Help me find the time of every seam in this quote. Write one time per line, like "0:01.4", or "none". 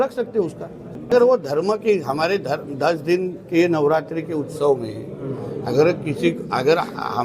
0:00.9